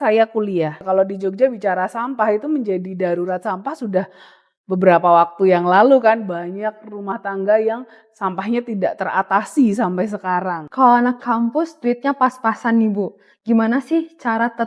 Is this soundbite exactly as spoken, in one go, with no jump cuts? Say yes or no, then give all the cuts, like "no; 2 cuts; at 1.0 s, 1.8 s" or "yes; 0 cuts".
no; 2 cuts; at 0.8 s, 10.6 s